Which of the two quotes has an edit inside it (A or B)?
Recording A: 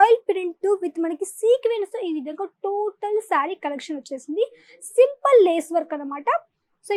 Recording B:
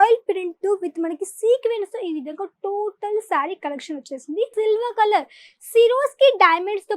B